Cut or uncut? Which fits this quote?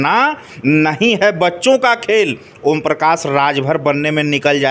uncut